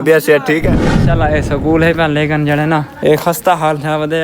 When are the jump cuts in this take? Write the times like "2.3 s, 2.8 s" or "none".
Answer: 1.0 s, 2.9 s